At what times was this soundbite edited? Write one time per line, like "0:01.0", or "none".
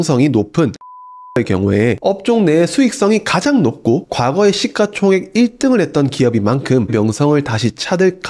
0:06.9